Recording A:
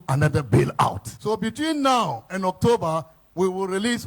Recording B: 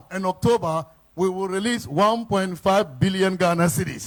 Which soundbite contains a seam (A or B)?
A